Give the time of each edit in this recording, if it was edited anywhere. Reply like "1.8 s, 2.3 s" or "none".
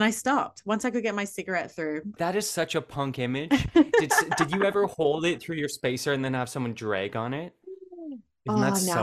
2.1 s